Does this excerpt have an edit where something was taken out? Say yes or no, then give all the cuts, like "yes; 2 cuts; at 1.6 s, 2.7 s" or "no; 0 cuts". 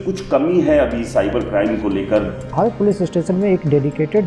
yes; 1 cut; at 2.6 s